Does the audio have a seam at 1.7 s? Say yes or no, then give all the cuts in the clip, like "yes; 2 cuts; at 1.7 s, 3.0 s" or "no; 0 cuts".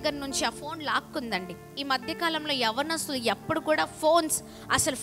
yes; 1 cut; at 1.7 s